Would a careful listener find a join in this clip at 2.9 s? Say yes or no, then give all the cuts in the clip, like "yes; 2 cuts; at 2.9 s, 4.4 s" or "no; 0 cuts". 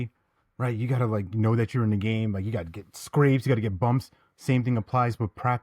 no; 0 cuts